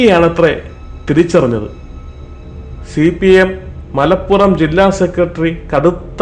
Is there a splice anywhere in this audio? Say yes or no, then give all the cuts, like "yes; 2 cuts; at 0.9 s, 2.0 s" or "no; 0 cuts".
no; 0 cuts